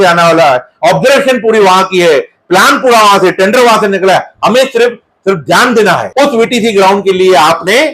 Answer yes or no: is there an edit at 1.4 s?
no